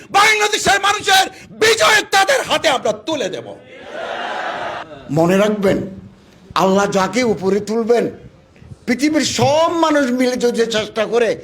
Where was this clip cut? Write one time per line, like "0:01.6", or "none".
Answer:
0:04.9